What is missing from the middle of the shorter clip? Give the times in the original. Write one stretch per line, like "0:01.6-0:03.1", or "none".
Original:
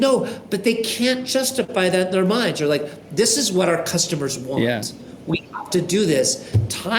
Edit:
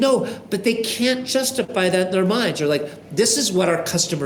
none